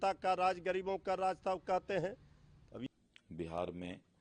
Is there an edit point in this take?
yes; 1 cut; at 2.8 s

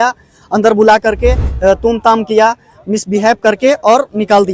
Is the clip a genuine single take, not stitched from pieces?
no; 1 cut; at 1.5 s

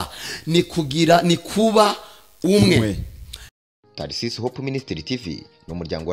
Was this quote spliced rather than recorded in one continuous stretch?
yes; 1 cut; at 3.6 s

